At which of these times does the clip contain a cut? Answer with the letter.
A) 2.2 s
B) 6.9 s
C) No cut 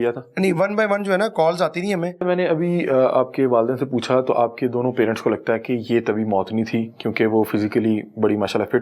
A